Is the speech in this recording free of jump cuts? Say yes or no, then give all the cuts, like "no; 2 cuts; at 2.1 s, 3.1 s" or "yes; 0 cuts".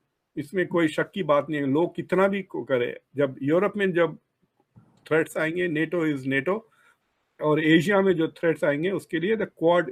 yes; 0 cuts